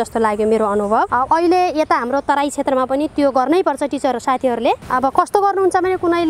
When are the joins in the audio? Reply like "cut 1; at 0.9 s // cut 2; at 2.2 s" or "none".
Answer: cut 1; at 1.1 s